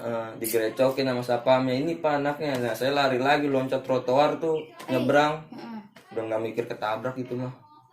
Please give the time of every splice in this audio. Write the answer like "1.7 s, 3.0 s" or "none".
none